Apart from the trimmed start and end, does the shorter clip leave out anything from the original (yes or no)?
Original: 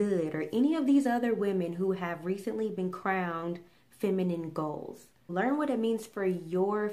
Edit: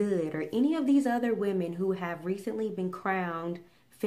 no